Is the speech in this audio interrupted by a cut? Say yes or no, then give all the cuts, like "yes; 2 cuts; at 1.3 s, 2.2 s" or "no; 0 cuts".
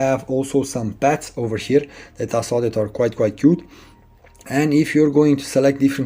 no; 0 cuts